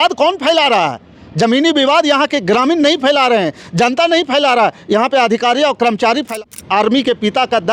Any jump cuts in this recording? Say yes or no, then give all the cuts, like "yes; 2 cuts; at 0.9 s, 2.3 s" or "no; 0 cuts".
yes; 1 cut; at 6.4 s